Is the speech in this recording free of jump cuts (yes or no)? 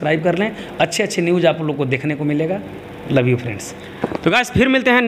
yes